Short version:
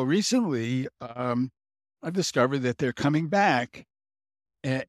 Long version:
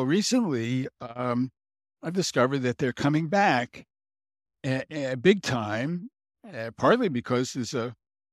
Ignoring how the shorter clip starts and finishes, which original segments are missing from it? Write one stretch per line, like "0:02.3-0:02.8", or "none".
none